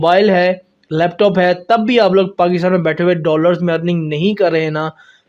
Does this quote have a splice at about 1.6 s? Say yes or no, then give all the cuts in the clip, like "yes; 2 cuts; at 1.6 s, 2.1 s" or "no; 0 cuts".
no; 0 cuts